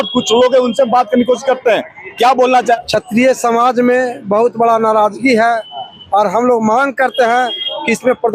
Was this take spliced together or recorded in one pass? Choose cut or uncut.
cut